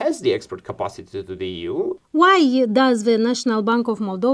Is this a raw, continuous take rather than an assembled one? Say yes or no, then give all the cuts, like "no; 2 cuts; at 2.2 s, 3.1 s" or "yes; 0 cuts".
no; 1 cut; at 2.0 s